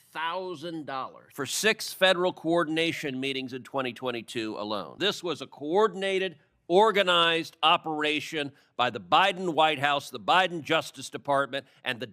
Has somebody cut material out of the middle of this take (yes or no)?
yes